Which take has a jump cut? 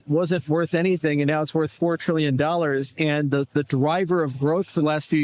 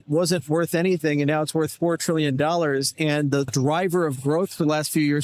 second; 1 cut; at 3.5 s

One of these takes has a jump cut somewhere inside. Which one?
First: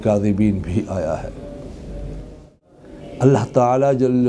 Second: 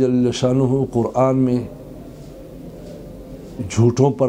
first; 1 cut; at 2.6 s

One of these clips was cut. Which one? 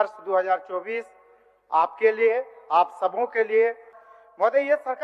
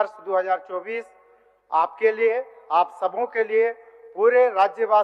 first; 1 cut; at 4.0 s

